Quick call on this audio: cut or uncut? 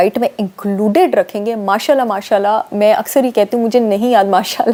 uncut